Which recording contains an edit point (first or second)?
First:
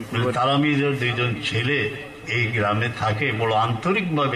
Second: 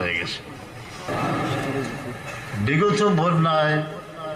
second